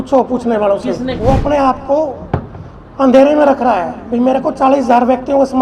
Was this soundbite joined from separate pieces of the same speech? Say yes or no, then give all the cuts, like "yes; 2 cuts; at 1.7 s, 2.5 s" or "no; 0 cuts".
yes; 1 cut; at 1.2 s